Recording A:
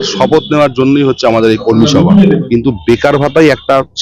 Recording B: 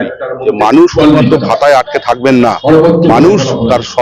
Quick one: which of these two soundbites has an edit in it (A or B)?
A